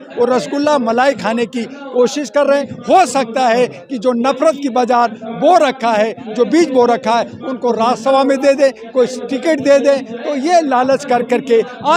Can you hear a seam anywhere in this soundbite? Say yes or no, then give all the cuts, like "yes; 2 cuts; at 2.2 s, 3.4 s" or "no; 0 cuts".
no; 0 cuts